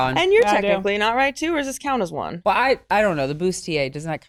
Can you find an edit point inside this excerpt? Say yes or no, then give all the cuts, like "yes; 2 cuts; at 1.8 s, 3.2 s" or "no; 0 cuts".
no; 0 cuts